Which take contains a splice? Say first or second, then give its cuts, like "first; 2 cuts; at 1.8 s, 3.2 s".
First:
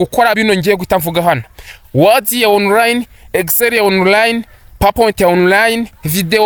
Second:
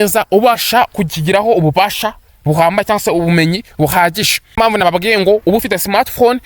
second; 1 cut; at 4.6 s